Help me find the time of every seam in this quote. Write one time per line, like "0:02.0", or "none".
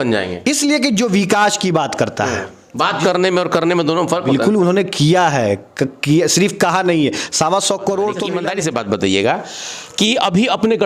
0:08.3